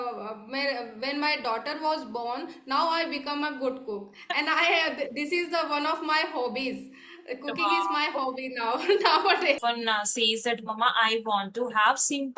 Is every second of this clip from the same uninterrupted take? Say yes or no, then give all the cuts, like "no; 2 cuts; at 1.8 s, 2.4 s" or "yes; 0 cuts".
no; 1 cut; at 9.6 s